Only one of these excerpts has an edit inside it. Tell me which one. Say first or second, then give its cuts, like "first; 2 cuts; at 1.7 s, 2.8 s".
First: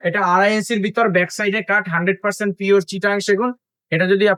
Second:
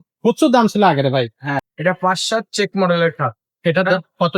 second; 1 cut; at 1.6 s